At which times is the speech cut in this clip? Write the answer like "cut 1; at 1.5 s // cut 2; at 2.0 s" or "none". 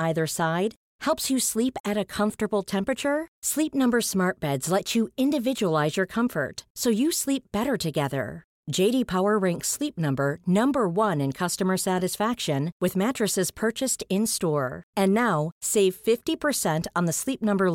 none